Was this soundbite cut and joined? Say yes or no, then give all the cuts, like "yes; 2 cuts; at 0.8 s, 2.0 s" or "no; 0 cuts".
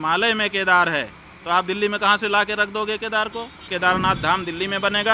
yes; 1 cut; at 3.6 s